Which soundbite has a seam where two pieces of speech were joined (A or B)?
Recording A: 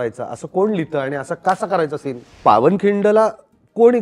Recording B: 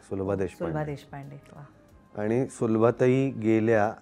A